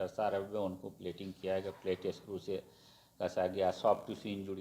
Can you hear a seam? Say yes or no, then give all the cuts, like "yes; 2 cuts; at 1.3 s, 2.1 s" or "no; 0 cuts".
no; 0 cuts